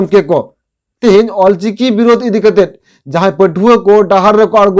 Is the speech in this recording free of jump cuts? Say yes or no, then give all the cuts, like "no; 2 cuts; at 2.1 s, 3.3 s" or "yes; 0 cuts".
yes; 0 cuts